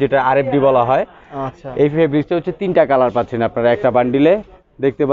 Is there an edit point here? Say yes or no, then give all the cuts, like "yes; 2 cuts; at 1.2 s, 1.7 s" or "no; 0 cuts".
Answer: no; 0 cuts